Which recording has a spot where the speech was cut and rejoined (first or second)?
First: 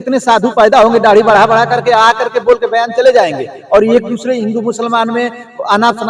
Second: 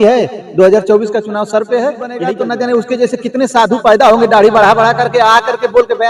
second